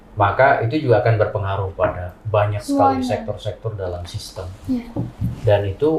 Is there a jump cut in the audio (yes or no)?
no